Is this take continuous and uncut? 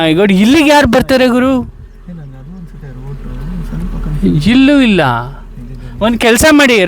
yes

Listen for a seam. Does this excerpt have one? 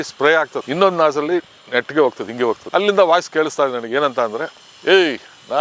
yes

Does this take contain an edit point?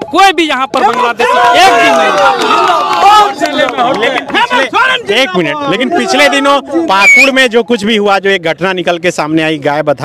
no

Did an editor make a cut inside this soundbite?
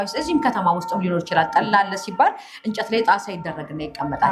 no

